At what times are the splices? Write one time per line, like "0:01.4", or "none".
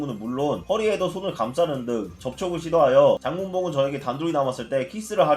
0:03.2